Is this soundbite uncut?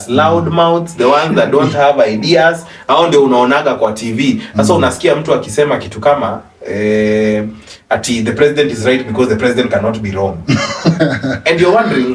yes; 0 cuts

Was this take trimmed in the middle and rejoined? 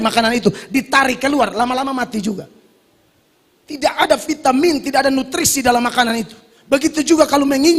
no; 0 cuts

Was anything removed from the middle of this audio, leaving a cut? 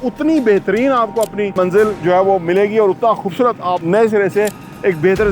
yes; 2 cuts; at 1.5 s, 3.8 s

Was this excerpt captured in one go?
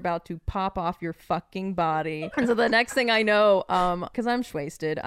no; 2 cuts; at 2.3 s, 4.1 s

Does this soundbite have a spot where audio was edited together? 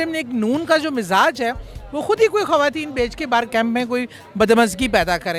no; 0 cuts

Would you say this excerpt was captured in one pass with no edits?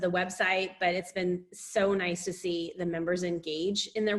yes; 0 cuts

